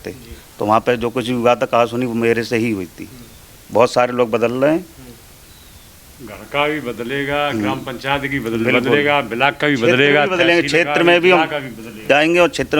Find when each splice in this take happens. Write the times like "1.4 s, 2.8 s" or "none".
3.5 s